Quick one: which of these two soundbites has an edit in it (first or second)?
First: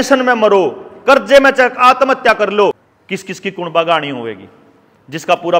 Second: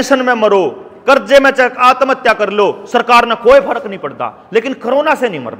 first